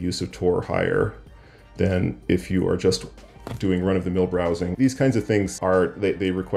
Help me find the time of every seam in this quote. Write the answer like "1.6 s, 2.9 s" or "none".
4.7 s, 5.6 s